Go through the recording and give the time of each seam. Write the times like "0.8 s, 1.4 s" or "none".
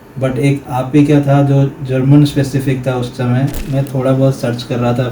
3.6 s